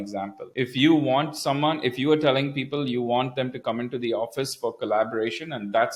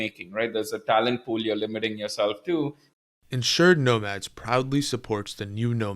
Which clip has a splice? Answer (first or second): second